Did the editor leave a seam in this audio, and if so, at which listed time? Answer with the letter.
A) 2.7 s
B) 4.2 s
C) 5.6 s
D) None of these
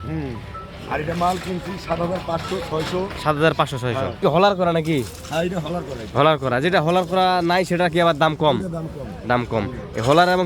B